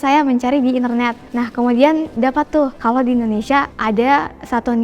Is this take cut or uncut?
cut